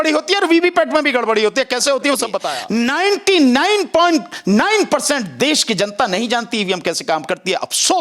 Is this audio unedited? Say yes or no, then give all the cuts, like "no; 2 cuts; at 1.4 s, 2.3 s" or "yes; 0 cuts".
no; 1 cut; at 2.6 s